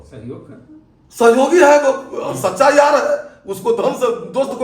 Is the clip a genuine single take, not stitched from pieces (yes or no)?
yes